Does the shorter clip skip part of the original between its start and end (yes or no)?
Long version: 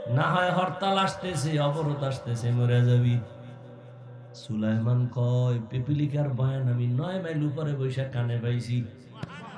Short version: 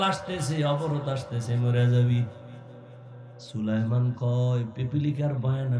no